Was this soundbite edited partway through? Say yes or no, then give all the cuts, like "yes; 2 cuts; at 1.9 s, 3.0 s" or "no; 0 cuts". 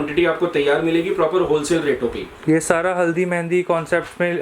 no; 0 cuts